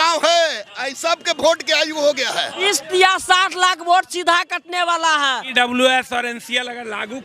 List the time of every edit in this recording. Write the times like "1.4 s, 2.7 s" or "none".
2.6 s, 5.4 s